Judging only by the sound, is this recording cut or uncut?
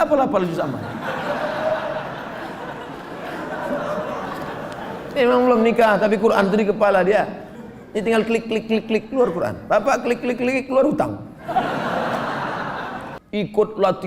cut